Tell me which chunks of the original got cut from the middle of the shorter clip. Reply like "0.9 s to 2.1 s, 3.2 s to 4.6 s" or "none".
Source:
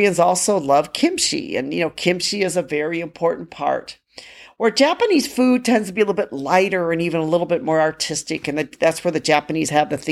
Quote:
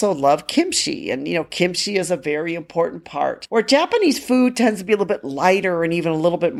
3.9 s to 4.5 s